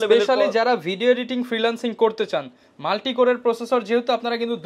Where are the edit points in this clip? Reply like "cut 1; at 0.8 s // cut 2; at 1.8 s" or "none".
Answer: none